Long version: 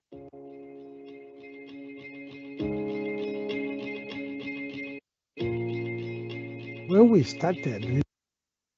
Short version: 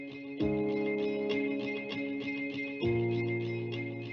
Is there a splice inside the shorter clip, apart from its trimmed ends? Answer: yes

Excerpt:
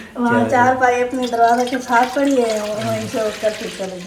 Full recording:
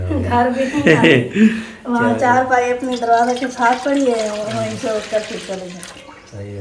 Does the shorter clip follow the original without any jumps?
yes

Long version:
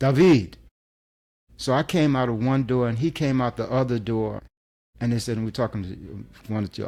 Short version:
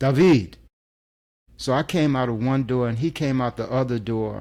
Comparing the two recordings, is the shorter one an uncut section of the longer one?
yes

